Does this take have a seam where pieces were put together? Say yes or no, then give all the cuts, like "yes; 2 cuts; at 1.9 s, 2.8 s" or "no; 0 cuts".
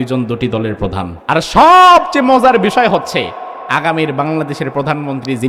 yes; 1 cut; at 1.1 s